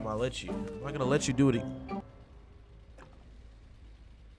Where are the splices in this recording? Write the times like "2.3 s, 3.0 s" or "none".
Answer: none